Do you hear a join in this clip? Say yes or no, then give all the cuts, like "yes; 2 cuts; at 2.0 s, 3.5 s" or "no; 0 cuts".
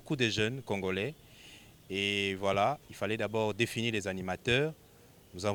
no; 0 cuts